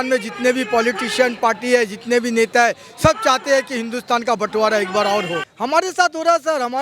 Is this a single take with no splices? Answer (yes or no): no